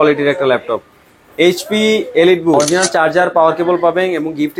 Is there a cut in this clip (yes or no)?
yes